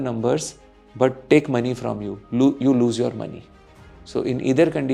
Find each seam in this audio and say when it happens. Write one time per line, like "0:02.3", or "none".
none